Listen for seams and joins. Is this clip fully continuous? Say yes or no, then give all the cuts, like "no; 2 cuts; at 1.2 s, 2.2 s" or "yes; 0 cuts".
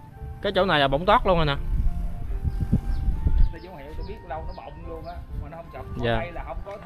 no; 1 cut; at 3.5 s